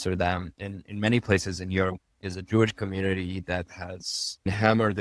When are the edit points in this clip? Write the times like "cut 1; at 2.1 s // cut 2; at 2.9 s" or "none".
none